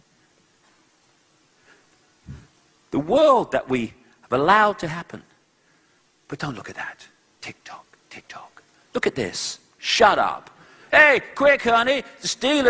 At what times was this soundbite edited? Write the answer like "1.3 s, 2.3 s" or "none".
none